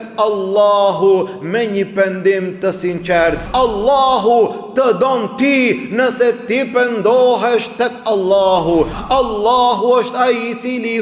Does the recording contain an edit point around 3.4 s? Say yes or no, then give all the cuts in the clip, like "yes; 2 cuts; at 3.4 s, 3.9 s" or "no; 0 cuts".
yes; 2 cuts; at 3.4 s, 9.0 s